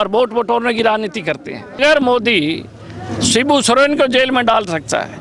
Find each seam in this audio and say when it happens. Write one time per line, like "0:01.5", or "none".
0:01.8

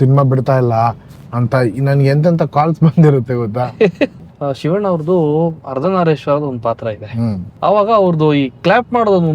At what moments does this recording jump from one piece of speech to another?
0:04.2
0:07.5

